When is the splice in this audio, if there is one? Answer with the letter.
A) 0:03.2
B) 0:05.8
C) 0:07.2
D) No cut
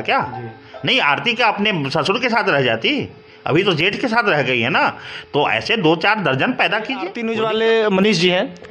C